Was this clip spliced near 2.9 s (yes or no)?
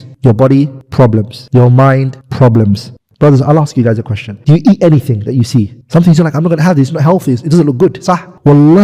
yes